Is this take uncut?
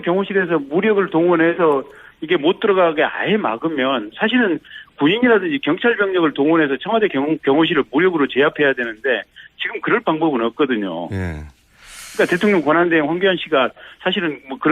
no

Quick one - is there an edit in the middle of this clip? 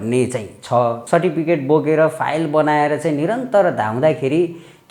yes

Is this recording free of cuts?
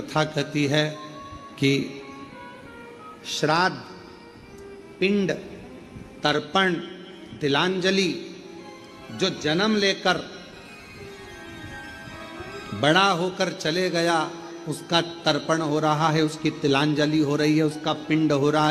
yes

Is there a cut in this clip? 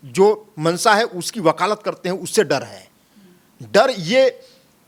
no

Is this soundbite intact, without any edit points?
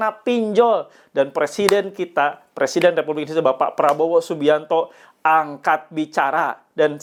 yes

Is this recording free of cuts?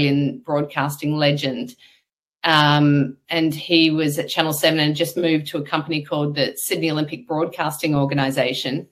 yes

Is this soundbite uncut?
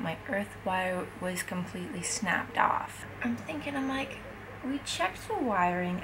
no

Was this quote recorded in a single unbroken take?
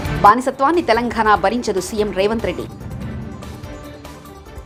yes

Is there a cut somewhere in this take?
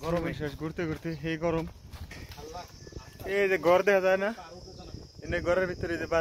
yes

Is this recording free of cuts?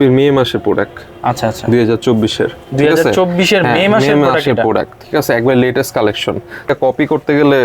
no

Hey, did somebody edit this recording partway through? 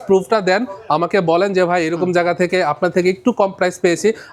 no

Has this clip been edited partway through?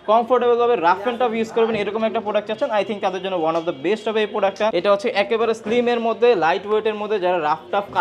yes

